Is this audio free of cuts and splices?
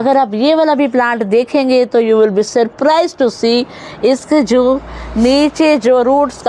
yes; 0 cuts

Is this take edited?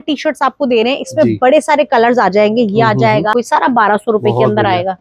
yes; 1 cut; at 3.3 s

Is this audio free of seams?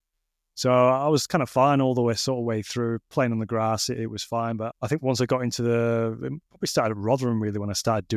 no; 1 cut; at 4.7 s

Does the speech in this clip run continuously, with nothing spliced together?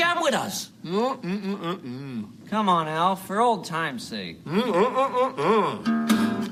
yes; 0 cuts

